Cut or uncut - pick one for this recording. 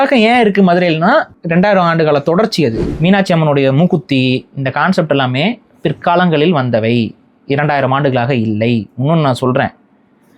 cut